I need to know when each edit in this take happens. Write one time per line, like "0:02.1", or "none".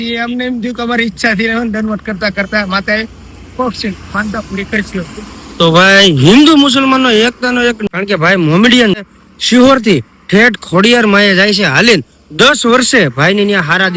0:07.8
0:09.0

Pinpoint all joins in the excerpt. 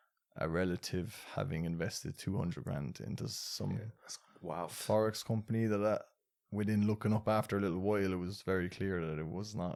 none

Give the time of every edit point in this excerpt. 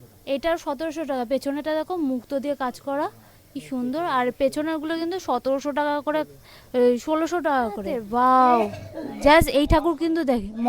0:08.0

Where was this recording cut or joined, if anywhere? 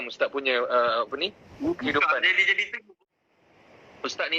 0:03.0

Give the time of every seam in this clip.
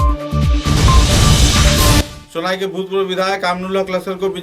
0:02.1

